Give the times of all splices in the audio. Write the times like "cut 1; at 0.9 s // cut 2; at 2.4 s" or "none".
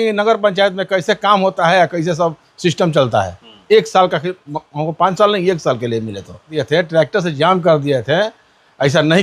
cut 1; at 6.6 s